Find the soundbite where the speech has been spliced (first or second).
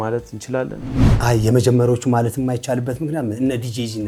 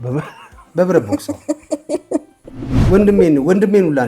second